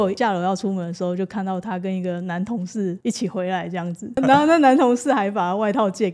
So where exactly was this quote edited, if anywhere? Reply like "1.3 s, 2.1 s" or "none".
3.0 s, 4.2 s